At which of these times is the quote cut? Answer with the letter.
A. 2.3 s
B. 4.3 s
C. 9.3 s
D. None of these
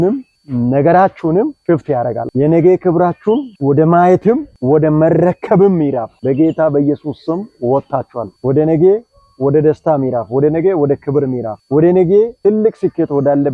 A